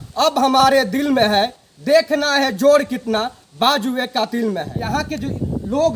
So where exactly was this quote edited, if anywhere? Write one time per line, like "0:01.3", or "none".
0:04.8